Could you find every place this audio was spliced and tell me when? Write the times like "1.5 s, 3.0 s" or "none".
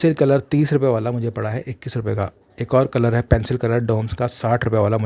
none